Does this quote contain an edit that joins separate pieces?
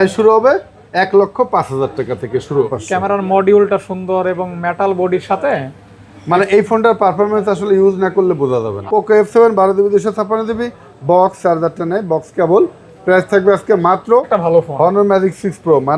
yes; 3 cuts; at 2.7 s, 8.7 s, 14.3 s

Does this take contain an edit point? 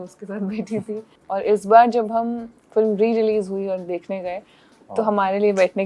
yes; 1 cut; at 1.2 s

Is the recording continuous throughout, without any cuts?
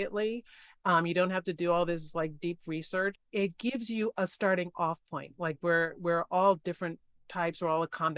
no; 1 cut; at 3.2 s

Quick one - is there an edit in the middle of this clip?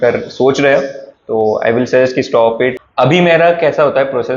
yes; 1 cut; at 2.7 s

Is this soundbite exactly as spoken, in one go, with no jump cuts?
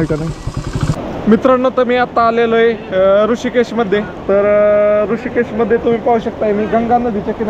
no; 1 cut; at 1.4 s

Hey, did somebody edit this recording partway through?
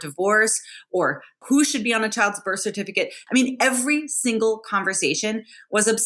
yes; 2 cuts; at 1.4 s, 3.2 s

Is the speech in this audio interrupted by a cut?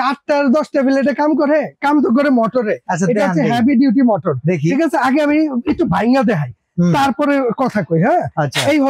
no; 0 cuts

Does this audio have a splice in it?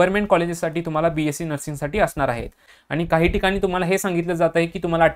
yes; 1 cut; at 2.7 s

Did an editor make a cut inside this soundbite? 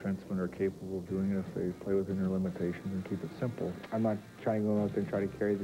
yes; 1 cut; at 3.8 s

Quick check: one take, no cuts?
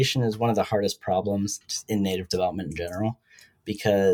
no; 1 cut; at 1.6 s

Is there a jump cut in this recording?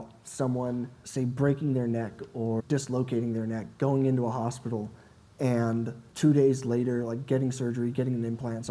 yes; 2 cuts; at 1.0 s, 2.6 s

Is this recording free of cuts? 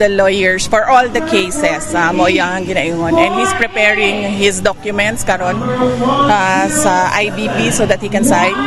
yes; 0 cuts

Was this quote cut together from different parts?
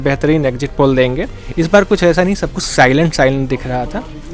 yes; 1 cut; at 1.4 s

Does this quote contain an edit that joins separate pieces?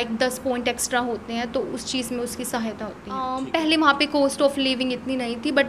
yes; 1 cut; at 3.3 s

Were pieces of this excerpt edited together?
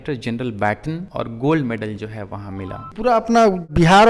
no; 0 cuts

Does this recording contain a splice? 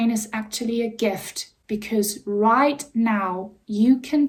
no; 0 cuts

